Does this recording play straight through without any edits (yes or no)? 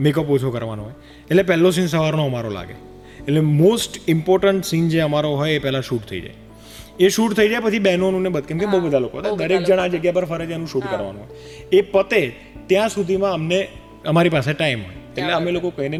yes